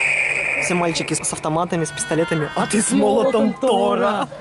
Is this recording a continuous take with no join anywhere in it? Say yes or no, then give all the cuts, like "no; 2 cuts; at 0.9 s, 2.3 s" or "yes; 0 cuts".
no; 1 cut; at 1.2 s